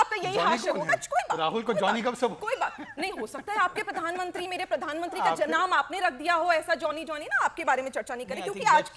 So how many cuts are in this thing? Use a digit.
1